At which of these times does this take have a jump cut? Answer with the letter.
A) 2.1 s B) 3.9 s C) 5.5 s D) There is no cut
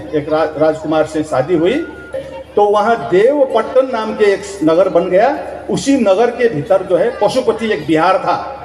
A